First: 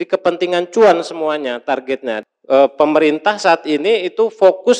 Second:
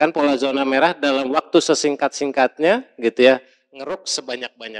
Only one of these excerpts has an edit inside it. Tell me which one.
first; 1 cut; at 2.1 s

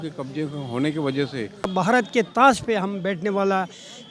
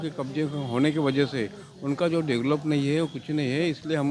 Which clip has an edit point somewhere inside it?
first; 1 cut; at 1.7 s

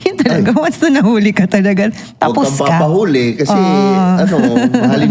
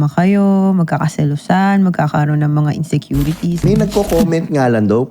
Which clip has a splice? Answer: second; 1 cut; at 3.6 s

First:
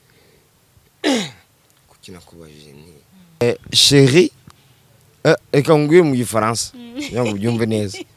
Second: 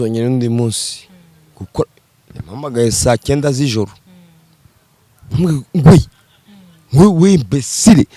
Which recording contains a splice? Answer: first; 1 cut; at 3.4 s

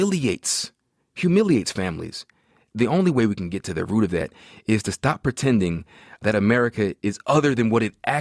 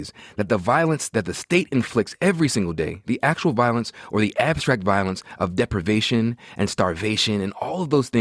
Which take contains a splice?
first; 2 cuts; at 2.6 s, 6.2 s

